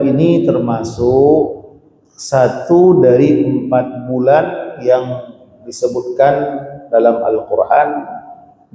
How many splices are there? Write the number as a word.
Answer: zero